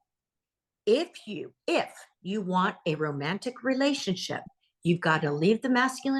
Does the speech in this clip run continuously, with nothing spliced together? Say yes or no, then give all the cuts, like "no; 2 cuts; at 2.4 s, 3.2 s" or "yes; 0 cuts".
yes; 0 cuts